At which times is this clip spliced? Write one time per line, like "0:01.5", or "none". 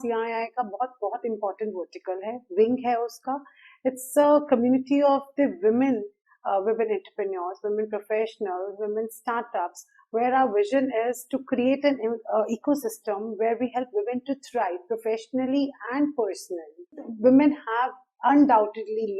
0:17.1